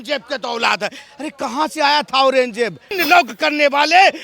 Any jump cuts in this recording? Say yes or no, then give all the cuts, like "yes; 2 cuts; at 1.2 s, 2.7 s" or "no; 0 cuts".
yes; 1 cut; at 3.0 s